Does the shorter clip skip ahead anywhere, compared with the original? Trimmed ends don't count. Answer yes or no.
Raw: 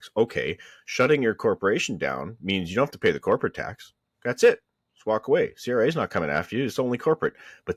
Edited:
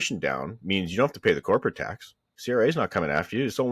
yes